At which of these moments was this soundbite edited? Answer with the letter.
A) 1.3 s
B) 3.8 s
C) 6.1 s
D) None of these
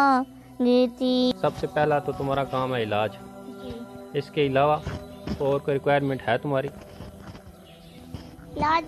A